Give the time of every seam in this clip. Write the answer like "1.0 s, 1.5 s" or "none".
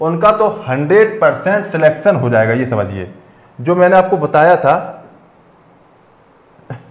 none